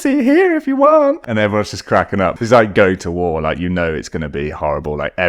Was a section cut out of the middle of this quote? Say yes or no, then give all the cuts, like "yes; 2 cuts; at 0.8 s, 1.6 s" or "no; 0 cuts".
yes; 2 cuts; at 1.2 s, 2.3 s